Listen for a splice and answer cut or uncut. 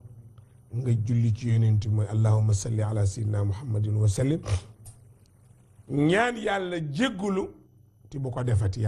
cut